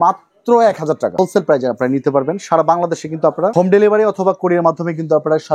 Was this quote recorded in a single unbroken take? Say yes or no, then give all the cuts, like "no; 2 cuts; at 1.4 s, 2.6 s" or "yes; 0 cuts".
no; 1 cut; at 1.1 s